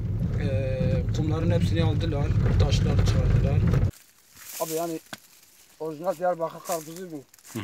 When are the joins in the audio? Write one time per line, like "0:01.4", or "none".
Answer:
0:03.9